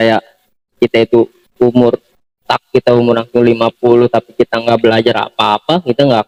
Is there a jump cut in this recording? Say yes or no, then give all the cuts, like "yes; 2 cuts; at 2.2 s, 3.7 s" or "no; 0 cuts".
no; 0 cuts